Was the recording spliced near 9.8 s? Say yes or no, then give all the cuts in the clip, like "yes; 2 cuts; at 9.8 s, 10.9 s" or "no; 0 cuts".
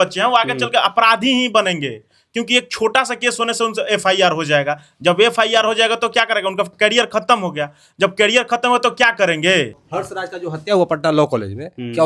yes; 1 cut; at 9.8 s